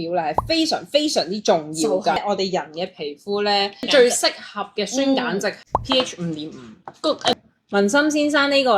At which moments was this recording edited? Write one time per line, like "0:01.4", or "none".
0:02.1
0:07.3